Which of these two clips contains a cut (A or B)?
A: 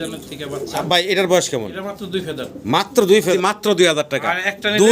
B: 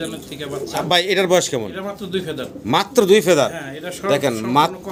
A